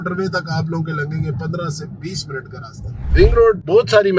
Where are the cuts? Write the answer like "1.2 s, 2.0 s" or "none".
3.1 s